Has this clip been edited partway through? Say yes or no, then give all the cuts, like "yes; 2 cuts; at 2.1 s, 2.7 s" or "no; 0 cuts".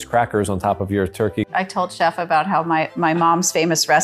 yes; 1 cut; at 1.5 s